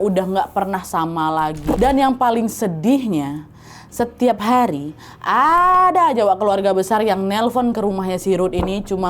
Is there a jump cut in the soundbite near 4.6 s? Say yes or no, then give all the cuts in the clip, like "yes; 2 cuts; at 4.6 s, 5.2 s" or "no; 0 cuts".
no; 1 cut; at 1.8 s